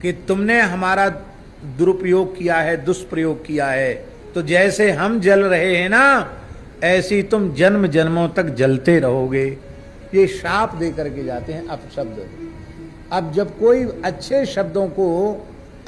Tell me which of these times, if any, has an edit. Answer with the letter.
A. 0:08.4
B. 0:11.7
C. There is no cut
A